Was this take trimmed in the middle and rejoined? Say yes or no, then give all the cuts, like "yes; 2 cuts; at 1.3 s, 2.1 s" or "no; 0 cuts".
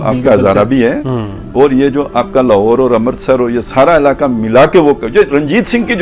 no; 0 cuts